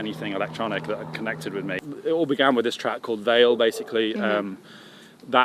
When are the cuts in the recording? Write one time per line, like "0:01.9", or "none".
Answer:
0:01.8